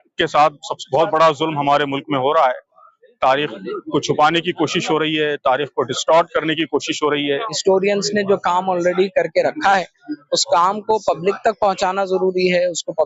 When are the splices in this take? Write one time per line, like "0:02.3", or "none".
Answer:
0:07.5